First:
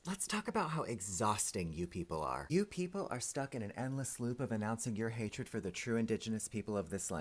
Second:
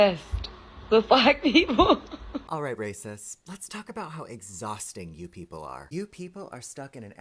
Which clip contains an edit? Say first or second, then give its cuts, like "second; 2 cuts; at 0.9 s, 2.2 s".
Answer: second; 1 cut; at 2.5 s